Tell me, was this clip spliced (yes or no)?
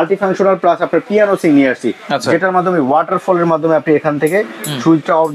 no